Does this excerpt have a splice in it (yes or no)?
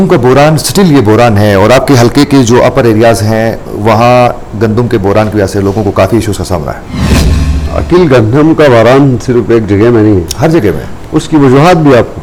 no